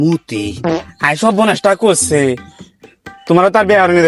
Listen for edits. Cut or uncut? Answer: uncut